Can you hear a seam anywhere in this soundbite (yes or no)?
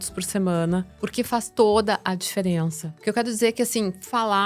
yes